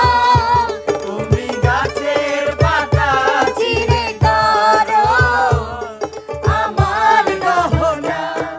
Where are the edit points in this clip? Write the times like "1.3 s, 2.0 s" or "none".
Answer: none